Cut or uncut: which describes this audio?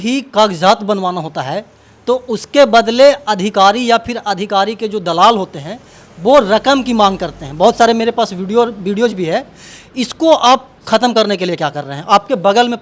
uncut